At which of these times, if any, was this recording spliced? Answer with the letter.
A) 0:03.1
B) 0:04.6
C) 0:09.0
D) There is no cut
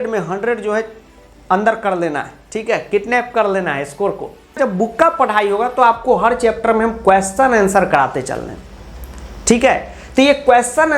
B